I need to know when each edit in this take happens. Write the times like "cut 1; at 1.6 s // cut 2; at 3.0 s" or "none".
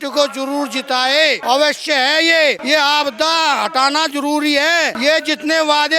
cut 1; at 1.4 s // cut 2; at 2.6 s // cut 3; at 5.0 s